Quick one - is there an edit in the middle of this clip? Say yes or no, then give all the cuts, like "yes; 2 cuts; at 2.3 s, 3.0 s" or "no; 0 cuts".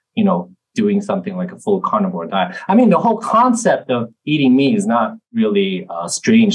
yes; 1 cut; at 5.2 s